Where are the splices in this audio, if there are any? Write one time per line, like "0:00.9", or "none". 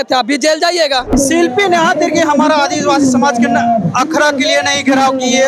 0:01.1

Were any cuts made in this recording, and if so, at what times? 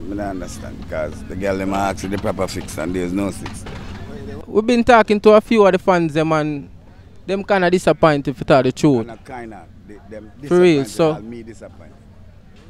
0:04.4

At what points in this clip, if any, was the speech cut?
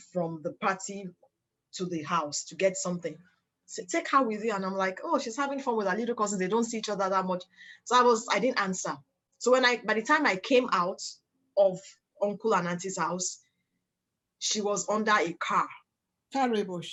none

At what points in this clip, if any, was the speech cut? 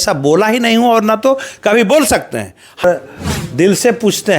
0:02.8

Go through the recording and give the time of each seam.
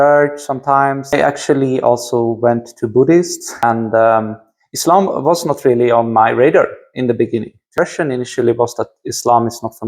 0:01.1
0:03.6
0:07.7

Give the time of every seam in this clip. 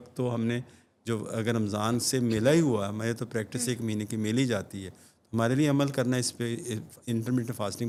none

